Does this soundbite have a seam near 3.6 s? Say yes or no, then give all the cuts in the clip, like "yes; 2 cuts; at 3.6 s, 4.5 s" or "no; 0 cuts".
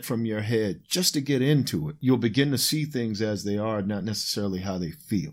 no; 1 cut; at 2.0 s